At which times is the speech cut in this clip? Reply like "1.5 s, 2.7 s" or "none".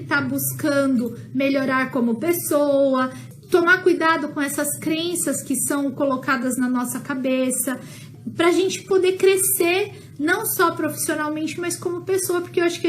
3.2 s, 8.1 s